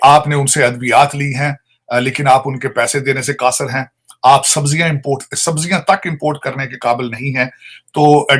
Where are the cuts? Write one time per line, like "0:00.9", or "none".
none